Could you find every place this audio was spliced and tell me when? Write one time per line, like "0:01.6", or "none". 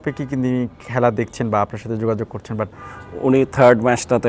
0:02.7